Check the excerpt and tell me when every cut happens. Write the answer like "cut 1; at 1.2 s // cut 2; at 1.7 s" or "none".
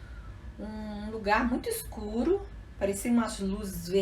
none